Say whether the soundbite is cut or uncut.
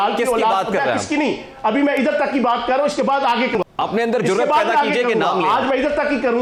uncut